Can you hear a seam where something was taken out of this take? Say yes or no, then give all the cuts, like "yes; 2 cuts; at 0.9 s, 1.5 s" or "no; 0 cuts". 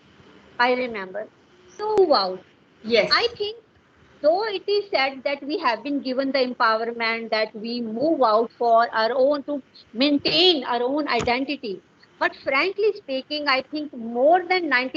yes; 1 cut; at 2.0 s